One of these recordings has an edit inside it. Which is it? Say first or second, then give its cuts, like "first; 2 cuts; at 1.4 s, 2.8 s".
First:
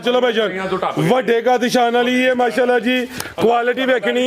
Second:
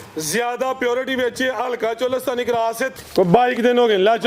second; 1 cut; at 2.9 s